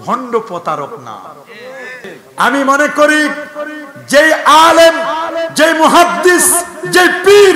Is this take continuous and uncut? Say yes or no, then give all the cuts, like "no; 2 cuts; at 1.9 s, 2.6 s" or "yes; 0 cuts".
no; 1 cut; at 2.2 s